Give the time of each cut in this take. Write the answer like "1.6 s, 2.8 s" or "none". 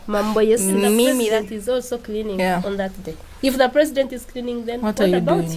1.3 s